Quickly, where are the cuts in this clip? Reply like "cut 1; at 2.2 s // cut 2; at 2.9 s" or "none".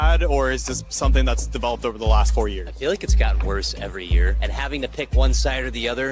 none

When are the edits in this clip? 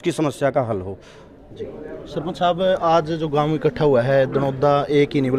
none

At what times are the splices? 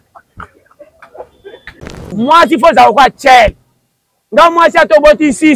cut 1; at 1.9 s

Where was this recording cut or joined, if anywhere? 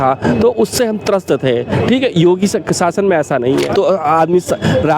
cut 1; at 3.7 s

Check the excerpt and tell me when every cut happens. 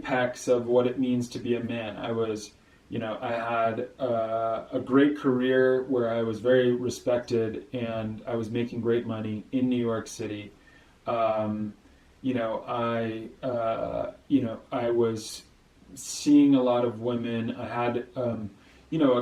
none

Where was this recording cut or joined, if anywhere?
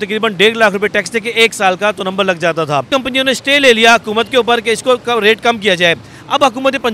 cut 1; at 2.9 s

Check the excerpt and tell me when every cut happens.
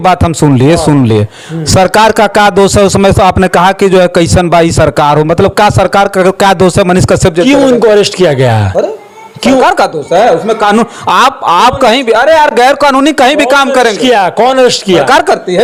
none

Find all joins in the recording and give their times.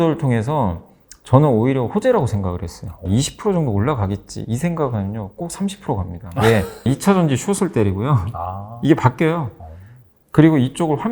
cut 1; at 3.1 s // cut 2; at 6.8 s

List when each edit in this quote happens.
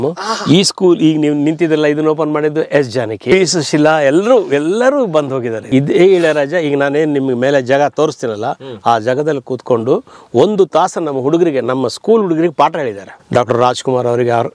cut 1; at 3.3 s // cut 2; at 5.6 s // cut 3; at 13.2 s

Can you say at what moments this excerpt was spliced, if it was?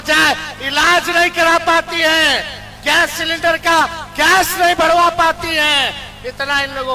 none

